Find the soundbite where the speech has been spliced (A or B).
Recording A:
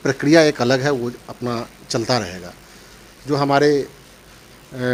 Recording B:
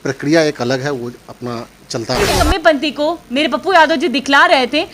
B